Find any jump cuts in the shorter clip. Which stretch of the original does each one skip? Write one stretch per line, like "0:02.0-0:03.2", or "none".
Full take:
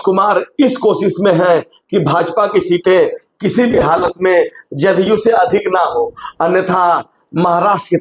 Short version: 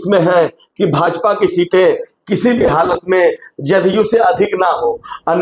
none

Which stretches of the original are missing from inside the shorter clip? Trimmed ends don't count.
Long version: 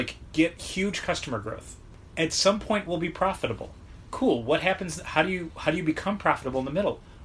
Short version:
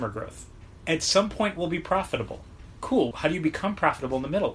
0:04.4-0:05.6

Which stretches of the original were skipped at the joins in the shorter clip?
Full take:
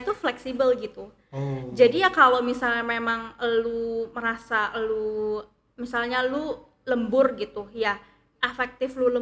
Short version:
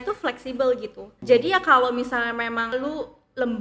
0:01.1-0:01.6
0:03.2-0:06.2

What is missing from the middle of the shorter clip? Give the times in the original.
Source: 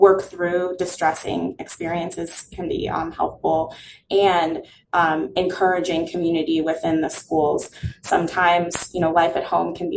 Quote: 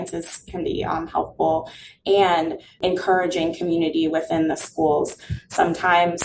0:04.8-0:05.3

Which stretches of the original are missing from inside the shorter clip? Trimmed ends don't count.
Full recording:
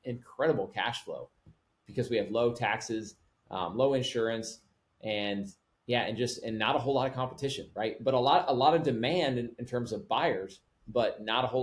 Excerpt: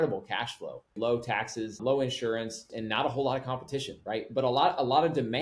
0:01.4-0:02.3
0:03.1-0:03.7
0:04.6-0:06.4

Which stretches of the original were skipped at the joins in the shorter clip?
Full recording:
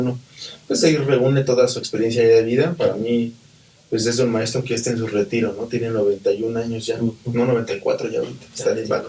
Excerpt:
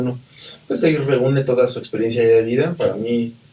none

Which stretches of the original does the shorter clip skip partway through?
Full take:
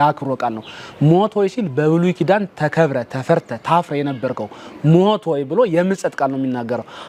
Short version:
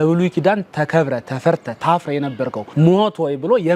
0:04.5-0:04.7

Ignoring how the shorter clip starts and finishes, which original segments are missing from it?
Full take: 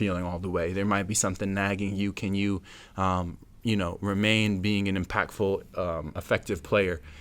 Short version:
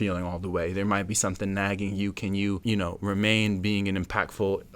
0:02.6-0:03.6

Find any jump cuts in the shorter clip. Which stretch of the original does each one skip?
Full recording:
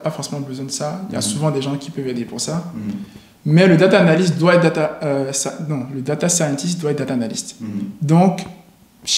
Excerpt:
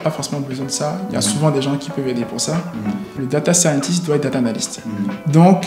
0:03.2-0:05.9

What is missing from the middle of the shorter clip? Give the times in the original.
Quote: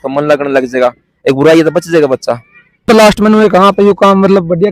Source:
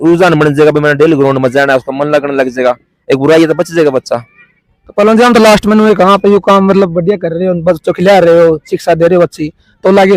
0:04.7-0:05.3

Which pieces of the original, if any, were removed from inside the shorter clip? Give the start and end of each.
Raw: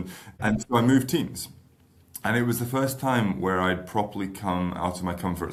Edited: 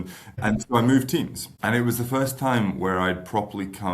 0:01.4-0:02.0

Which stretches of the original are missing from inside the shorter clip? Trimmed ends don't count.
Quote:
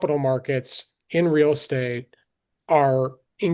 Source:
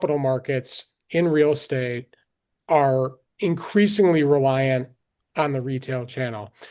none

